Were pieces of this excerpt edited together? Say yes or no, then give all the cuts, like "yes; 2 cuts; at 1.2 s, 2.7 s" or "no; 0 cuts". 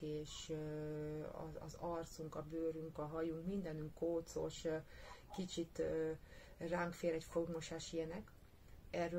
no; 0 cuts